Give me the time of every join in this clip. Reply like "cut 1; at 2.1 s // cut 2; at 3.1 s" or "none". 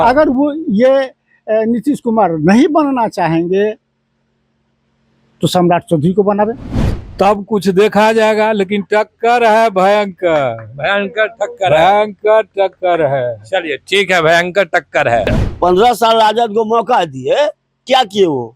cut 1; at 6.7 s // cut 2; at 15.4 s